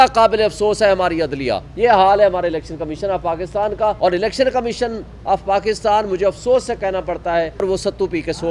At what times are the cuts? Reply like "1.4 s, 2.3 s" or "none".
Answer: 1.6 s, 4.0 s, 7.6 s

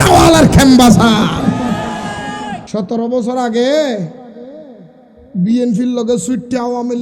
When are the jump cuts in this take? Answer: 2.6 s

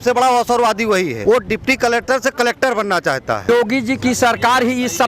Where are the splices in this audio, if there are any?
1.2 s, 3.5 s

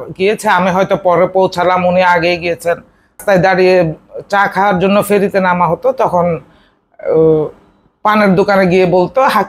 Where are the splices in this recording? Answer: 3.2 s

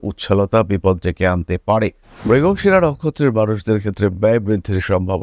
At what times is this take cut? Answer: 2.1 s

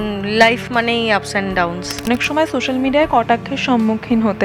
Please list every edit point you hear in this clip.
2.1 s

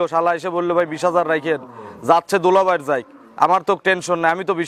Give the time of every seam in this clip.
none

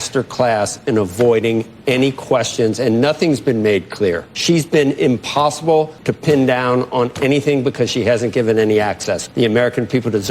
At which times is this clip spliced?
4.3 s, 6.0 s, 9.2 s

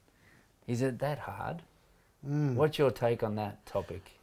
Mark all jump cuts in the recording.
none

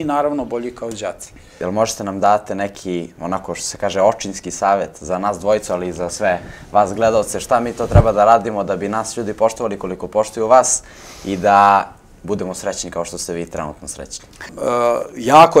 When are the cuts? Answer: 1.5 s, 14.5 s

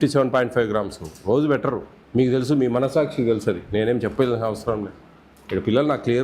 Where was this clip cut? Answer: 1.9 s

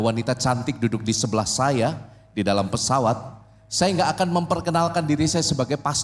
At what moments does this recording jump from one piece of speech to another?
none

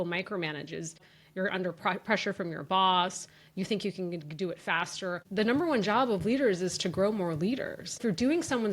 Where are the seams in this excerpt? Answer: 1.0 s, 5.2 s, 8.0 s

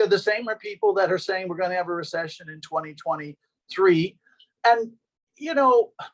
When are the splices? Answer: none

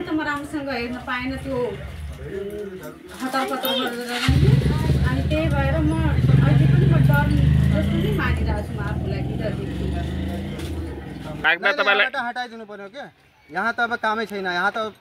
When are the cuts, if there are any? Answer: 11.4 s

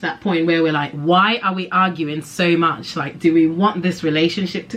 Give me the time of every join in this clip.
none

